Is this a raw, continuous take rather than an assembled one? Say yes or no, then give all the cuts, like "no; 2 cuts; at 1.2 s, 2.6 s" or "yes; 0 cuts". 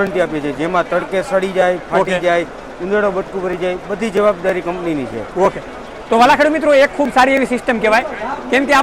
yes; 0 cuts